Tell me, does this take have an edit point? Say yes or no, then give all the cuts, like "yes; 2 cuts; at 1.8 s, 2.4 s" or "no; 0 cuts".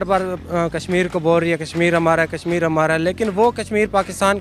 no; 0 cuts